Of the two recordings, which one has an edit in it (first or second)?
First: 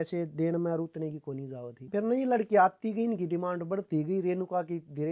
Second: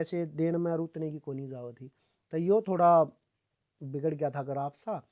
first